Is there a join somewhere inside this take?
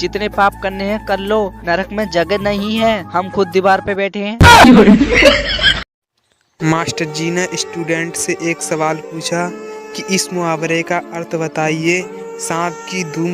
yes; 1 cut; at 5.9 s

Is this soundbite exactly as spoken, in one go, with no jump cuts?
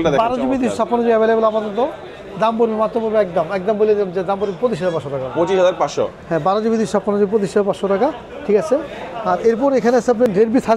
yes; 0 cuts

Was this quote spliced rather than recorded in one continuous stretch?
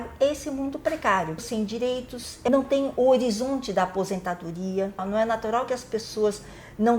yes; 2 cuts; at 1.8 s, 5.0 s

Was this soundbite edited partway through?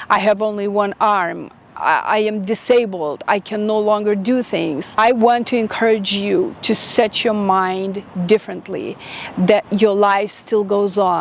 no; 0 cuts

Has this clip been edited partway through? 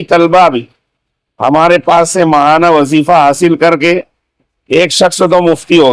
no; 0 cuts

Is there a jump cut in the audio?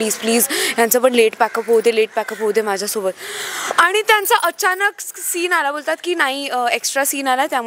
no; 0 cuts

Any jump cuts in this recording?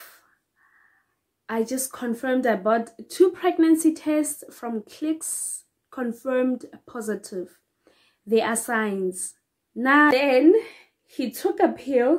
yes; 1 cut; at 10.1 s

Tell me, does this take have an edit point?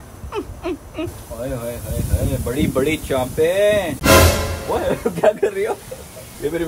yes; 1 cut; at 3.9 s

